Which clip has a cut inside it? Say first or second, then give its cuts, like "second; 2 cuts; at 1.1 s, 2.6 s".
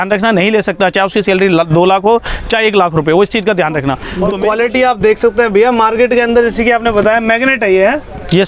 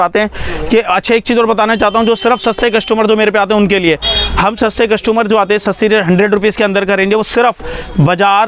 first; 1 cut; at 4.0 s